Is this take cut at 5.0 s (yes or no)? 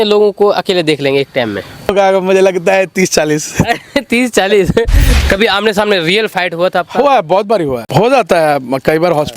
yes